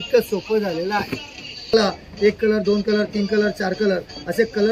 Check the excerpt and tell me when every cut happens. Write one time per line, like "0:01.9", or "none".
0:01.7